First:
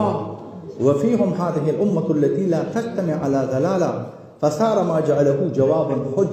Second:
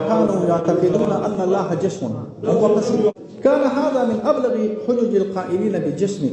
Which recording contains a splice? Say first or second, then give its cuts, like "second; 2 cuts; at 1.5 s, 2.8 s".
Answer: second; 1 cut; at 3.1 s